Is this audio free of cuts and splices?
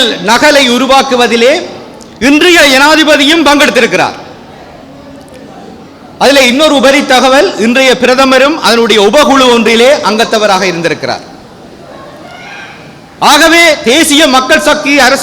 yes; 0 cuts

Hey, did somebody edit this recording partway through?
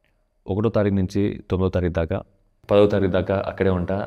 yes; 1 cut; at 2.5 s

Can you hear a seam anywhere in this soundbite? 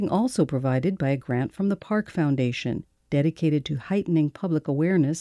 no; 0 cuts

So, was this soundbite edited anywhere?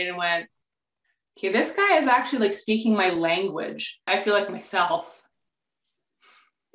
yes; 1 cut; at 4.0 s

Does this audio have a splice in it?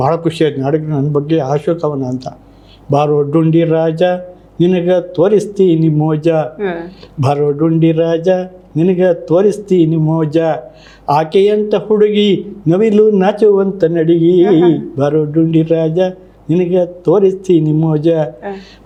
no; 0 cuts

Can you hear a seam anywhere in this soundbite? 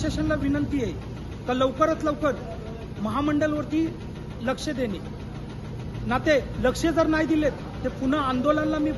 no; 0 cuts

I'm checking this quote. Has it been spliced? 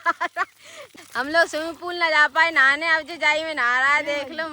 yes; 1 cut; at 1.0 s

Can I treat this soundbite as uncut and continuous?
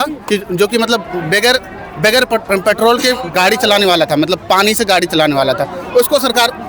yes; 0 cuts

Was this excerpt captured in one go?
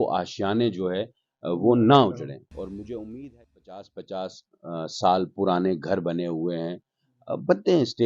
no; 1 cut; at 3.8 s

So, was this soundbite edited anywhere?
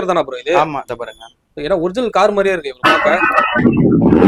no; 0 cuts

